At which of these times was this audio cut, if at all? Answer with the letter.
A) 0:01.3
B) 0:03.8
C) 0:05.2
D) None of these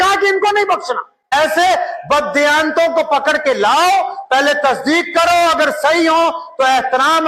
A